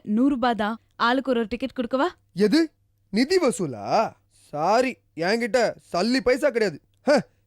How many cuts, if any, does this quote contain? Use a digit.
0